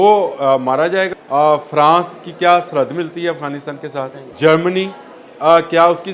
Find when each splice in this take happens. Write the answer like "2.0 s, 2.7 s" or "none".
1.1 s, 4.2 s